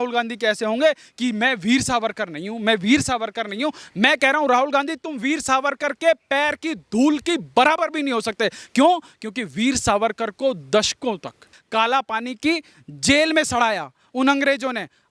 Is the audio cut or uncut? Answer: cut